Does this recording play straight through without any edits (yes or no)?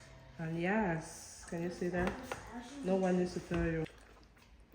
no